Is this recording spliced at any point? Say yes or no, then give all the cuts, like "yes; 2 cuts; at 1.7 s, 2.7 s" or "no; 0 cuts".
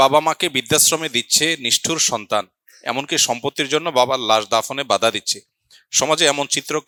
no; 0 cuts